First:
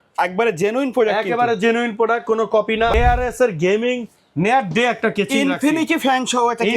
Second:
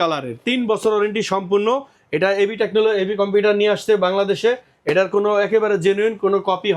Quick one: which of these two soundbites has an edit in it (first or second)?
first